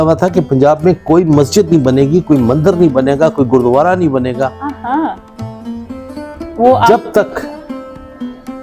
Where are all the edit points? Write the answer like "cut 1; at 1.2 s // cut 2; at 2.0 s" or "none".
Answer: none